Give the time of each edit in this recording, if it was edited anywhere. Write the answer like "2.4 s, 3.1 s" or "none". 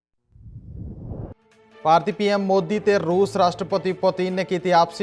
1.4 s